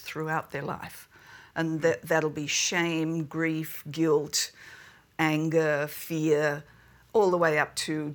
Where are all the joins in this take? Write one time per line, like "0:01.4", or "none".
none